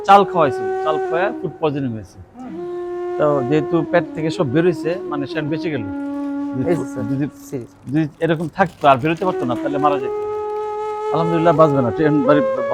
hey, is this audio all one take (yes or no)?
yes